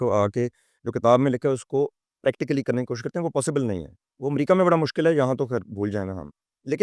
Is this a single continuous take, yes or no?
yes